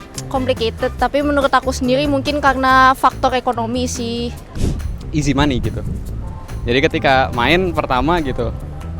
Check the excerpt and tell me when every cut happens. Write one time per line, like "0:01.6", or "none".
0:04.4